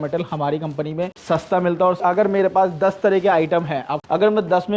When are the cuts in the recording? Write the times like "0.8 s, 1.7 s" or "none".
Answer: 1.2 s, 2.0 s, 3.9 s